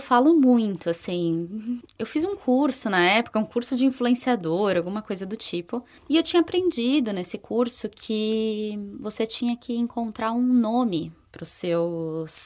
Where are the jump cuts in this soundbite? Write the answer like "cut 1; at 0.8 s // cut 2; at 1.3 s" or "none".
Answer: cut 1; at 1.9 s // cut 2; at 5.9 s